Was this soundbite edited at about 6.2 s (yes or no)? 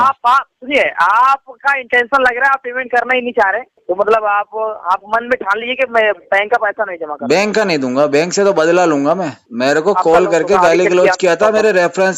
no